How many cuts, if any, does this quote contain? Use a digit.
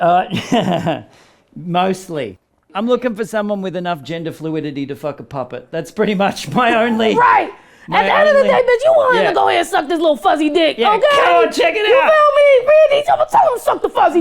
1